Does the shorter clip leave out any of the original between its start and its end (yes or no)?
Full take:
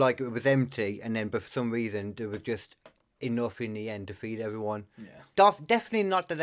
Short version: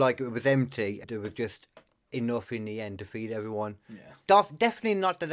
yes